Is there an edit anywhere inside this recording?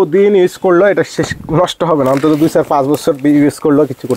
no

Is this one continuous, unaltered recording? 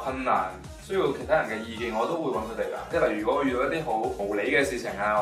no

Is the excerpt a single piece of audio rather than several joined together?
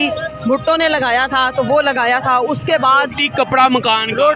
yes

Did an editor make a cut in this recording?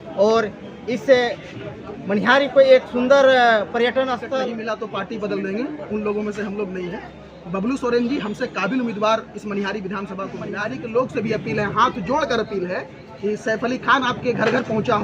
yes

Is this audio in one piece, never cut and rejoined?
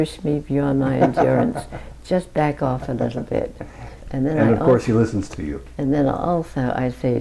yes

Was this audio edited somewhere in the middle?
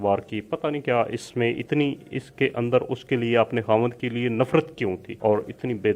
yes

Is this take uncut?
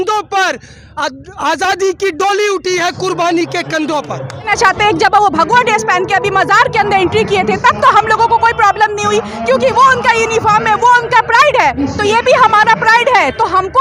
no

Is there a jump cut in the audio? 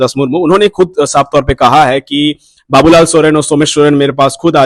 no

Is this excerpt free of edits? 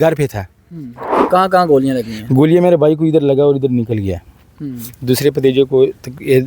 no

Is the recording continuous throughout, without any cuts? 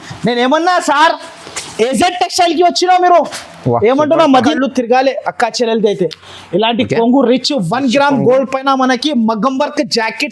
no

